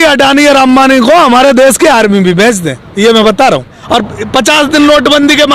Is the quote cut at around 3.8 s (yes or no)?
yes